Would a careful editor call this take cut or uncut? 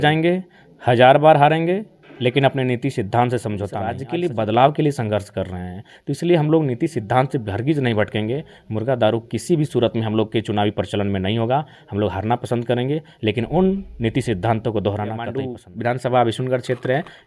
cut